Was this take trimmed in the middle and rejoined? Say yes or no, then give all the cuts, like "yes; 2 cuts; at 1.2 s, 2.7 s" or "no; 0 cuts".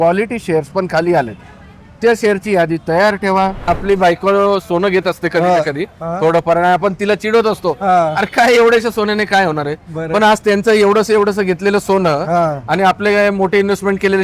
yes; 1 cut; at 3.7 s